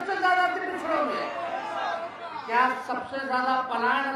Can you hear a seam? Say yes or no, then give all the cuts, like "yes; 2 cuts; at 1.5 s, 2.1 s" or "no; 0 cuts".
no; 0 cuts